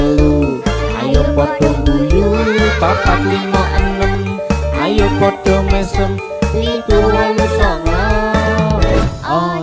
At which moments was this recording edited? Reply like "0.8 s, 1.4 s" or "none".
none